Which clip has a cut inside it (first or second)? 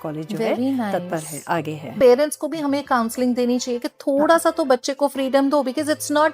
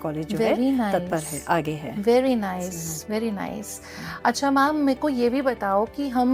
first